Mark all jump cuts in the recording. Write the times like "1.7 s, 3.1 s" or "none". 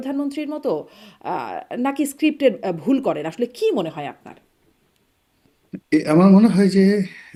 none

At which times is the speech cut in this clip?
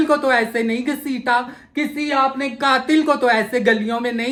none

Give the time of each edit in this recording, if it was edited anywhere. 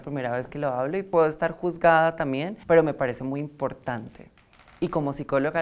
1.1 s, 2.5 s

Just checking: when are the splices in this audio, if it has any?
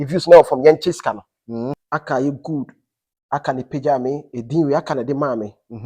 1.8 s

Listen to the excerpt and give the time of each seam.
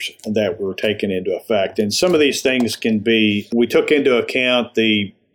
3.4 s

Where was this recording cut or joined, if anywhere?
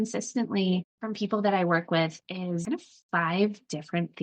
1.0 s, 2.6 s

